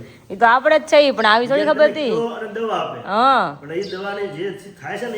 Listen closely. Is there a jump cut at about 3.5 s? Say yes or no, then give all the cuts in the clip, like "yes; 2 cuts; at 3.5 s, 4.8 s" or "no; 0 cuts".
no; 0 cuts